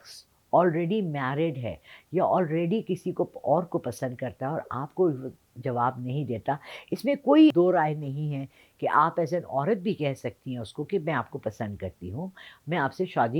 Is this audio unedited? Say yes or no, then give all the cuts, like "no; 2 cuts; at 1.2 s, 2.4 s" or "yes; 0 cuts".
yes; 0 cuts